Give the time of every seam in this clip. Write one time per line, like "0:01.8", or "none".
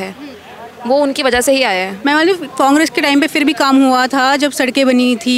0:01.9